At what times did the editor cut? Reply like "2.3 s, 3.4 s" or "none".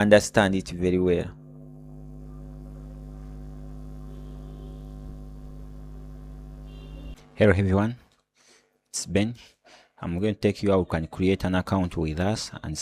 7.2 s